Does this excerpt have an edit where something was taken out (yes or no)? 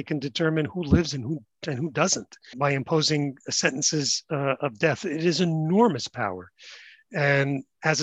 yes